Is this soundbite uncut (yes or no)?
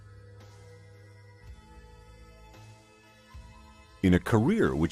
yes